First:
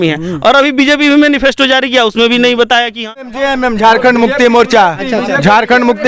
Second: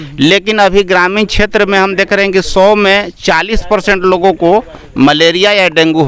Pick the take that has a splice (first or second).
first